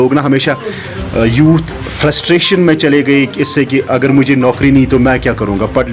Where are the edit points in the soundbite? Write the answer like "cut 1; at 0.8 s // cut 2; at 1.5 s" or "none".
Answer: none